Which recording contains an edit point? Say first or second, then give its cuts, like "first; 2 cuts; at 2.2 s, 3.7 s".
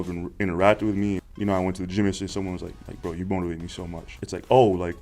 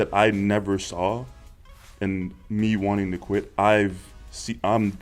first; 3 cuts; at 1.2 s, 2.7 s, 4.1 s